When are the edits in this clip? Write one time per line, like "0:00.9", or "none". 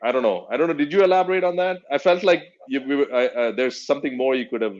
none

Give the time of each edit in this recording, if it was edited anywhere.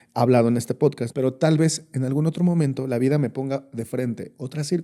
0:01.0

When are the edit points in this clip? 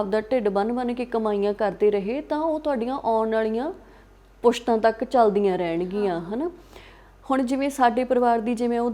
none

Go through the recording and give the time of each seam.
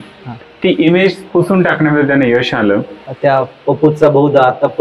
0:03.0

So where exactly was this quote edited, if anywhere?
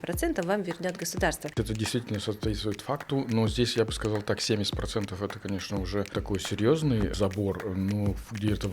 0:01.6
0:06.1
0:07.1

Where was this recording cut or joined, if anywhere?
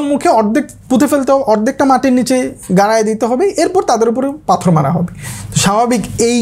none

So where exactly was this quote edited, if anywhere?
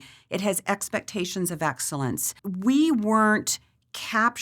0:02.3

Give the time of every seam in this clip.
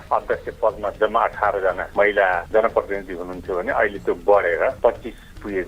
0:00.9
0:04.8

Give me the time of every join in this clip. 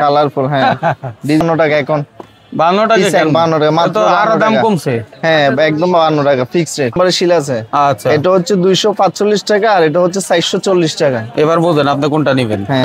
0:01.4
0:06.9

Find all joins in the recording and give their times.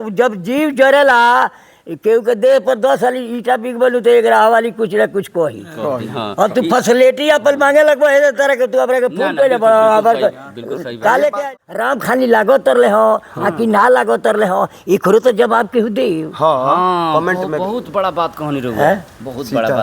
0:11.5

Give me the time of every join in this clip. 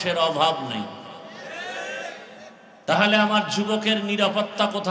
0:02.6

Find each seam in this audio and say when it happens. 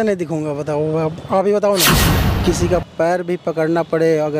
0:02.1

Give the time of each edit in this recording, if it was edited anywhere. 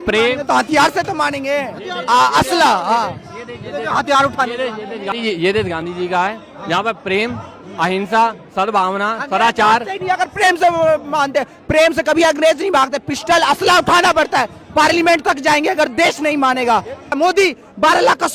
0:05.1
0:17.1

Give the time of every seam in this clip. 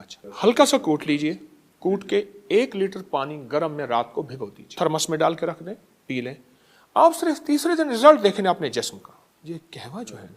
0:04.7
0:09.4

